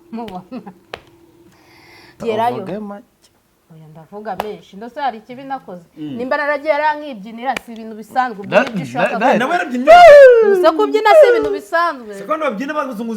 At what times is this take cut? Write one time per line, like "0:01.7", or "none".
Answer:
0:02.2